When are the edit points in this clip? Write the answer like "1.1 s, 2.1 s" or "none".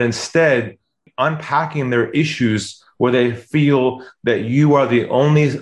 1.0 s